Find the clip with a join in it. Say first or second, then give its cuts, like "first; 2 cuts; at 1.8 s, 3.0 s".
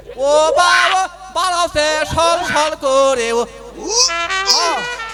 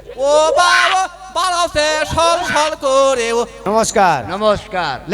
second; 1 cut; at 3.6 s